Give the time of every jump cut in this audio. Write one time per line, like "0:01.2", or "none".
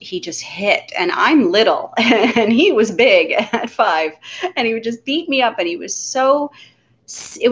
none